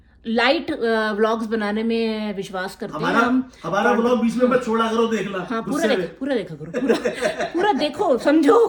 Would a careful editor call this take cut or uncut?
uncut